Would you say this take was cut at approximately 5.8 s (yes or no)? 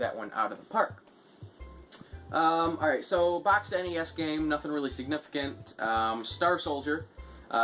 no